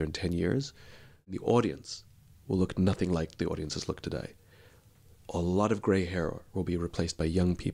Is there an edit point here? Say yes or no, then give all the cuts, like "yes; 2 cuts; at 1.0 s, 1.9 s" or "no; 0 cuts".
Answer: yes; 1 cut; at 1.4 s